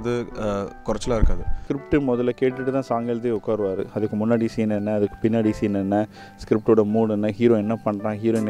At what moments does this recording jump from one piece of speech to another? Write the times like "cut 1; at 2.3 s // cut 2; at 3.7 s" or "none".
cut 1; at 1.5 s

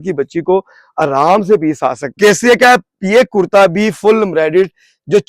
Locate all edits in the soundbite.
cut 1; at 2.2 s

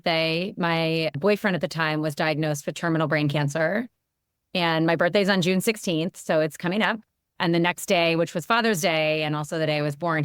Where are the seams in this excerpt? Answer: none

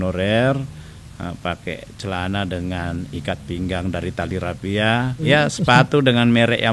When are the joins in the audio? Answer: cut 1; at 5.3 s

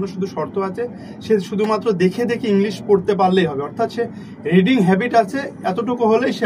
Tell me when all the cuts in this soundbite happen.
none

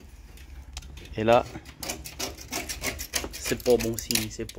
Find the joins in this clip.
none

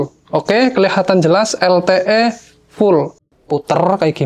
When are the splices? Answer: cut 1; at 3.4 s

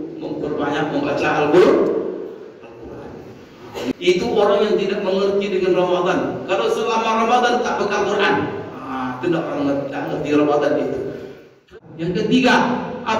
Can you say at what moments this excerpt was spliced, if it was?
cut 1; at 3.9 s // cut 2; at 11.7 s

